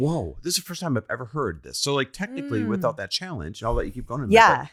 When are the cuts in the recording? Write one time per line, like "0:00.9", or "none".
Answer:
none